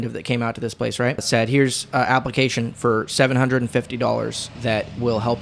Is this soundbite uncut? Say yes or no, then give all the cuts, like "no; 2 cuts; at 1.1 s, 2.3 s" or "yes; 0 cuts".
no; 2 cuts; at 1.3 s, 4.5 s